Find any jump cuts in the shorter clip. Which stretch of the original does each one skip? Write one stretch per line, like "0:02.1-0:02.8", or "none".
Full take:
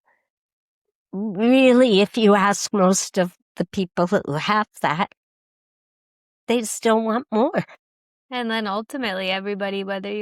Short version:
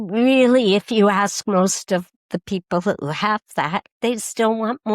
0:05.2-0:06.4